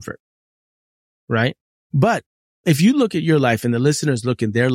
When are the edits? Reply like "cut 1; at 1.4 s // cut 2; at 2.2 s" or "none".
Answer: cut 1; at 2.6 s